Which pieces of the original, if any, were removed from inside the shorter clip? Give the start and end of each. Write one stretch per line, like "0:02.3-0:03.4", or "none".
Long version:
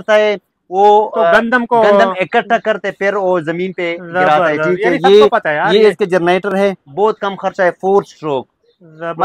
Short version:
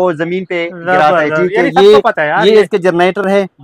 none